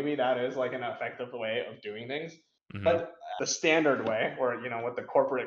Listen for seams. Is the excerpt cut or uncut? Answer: uncut